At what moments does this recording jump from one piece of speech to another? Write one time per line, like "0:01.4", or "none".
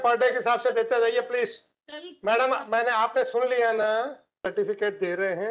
0:04.4